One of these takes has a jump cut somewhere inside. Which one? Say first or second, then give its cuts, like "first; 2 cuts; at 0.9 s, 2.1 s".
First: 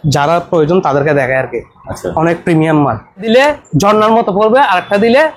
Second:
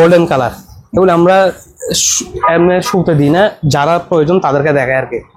first; 1 cut; at 3.3 s